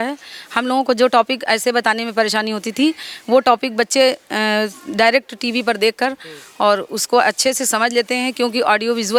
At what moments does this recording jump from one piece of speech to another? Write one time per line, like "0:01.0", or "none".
none